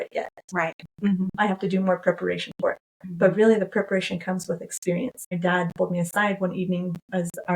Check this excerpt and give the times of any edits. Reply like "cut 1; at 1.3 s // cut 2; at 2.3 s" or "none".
cut 1; at 5.4 s